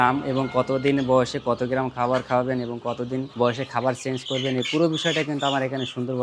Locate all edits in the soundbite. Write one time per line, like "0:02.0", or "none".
0:03.3